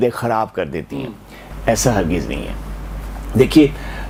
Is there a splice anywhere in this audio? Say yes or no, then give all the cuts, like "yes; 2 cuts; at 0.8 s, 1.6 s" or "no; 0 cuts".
no; 0 cuts